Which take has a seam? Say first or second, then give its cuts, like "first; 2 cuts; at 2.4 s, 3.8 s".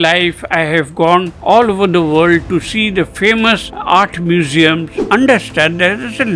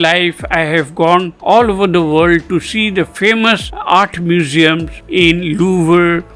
first; 1 cut; at 5.0 s